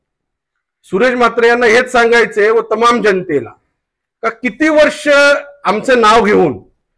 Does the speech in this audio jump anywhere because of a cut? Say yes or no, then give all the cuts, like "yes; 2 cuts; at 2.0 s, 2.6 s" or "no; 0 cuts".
no; 0 cuts